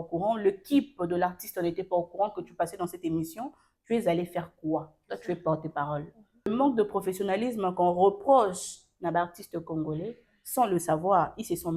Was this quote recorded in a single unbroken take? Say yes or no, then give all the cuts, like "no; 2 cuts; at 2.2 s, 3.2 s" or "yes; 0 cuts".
no; 1 cut; at 6.5 s